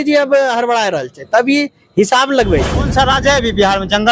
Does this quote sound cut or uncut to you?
cut